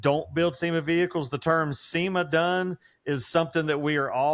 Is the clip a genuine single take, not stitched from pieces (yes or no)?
yes